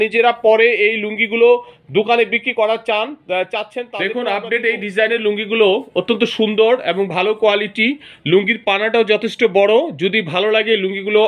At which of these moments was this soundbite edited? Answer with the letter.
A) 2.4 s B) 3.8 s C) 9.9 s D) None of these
B